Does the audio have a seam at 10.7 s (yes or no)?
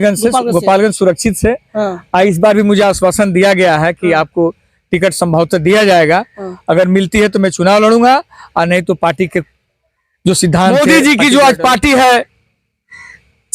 yes